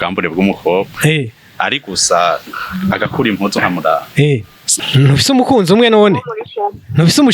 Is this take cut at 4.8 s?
yes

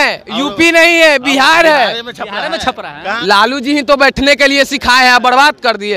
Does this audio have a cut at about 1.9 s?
no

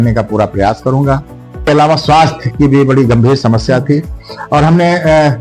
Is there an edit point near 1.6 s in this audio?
yes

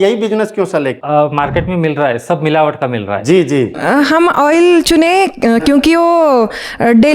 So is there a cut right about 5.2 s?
no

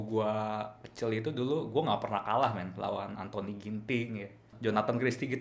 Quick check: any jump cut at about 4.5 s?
yes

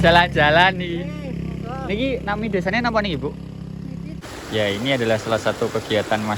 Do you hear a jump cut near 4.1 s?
yes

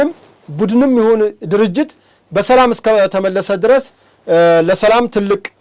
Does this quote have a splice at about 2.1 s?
no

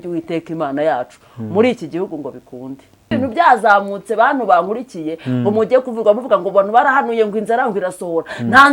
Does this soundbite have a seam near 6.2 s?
no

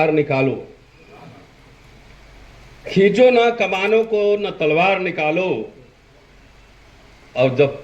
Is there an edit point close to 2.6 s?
no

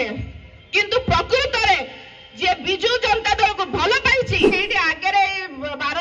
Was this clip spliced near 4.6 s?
yes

